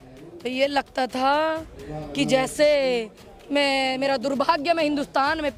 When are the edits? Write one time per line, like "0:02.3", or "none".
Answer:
none

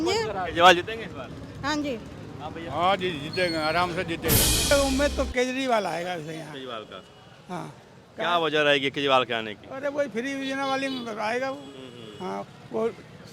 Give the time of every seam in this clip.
0:04.7

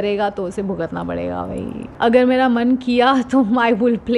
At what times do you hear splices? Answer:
0:01.8

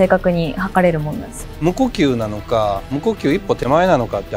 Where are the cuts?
0:01.4

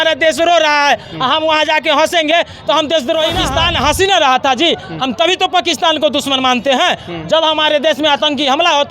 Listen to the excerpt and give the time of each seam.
0:03.4

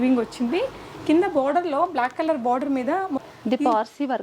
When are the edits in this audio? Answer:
0:03.3

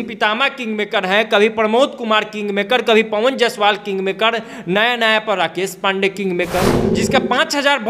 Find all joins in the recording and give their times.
0:06.8

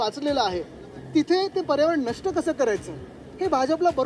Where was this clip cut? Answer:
none

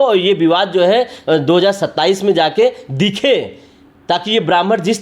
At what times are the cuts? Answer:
none

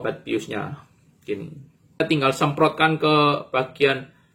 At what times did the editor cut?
0:02.0

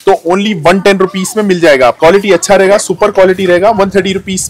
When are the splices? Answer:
0:02.0

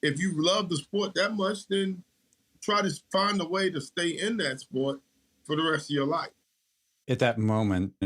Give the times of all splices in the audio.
0:06.4

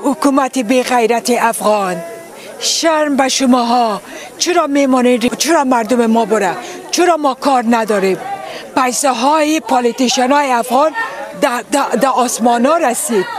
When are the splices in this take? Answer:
none

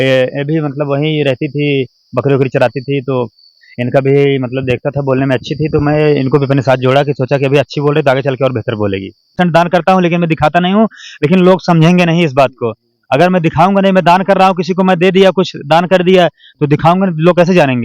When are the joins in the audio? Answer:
0:09.3

